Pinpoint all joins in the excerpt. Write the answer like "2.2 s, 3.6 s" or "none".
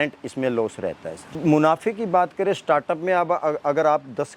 1.4 s